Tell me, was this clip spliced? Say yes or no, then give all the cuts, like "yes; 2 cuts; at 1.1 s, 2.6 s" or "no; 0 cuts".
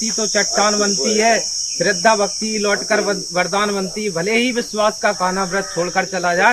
no; 0 cuts